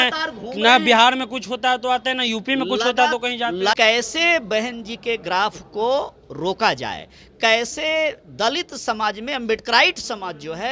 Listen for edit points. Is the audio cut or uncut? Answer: cut